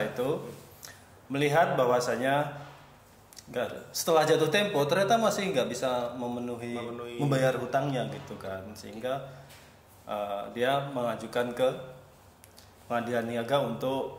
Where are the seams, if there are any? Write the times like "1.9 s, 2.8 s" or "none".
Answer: none

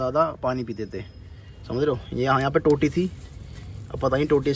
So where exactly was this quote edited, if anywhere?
none

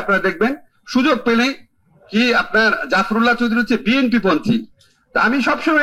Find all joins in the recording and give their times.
none

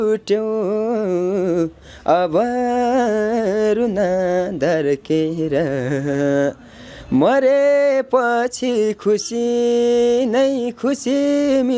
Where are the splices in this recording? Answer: none

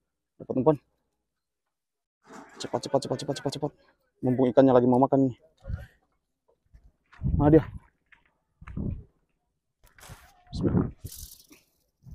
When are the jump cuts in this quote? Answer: none

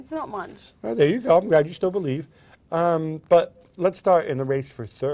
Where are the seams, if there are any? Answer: 1.2 s

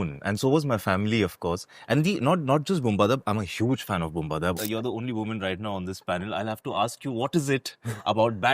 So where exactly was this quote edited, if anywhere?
4.6 s

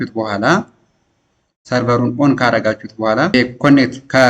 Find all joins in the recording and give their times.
3.3 s

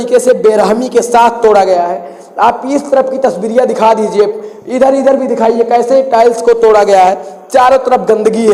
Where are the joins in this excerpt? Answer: none

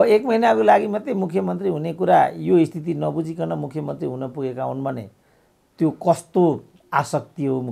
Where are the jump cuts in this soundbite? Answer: none

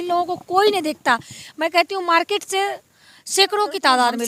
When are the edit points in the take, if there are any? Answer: none

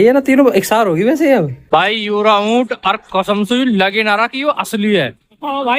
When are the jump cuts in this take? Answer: 1.6 s

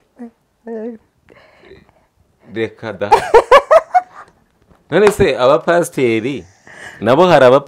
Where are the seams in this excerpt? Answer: none

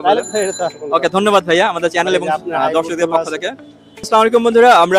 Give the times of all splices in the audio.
4.1 s

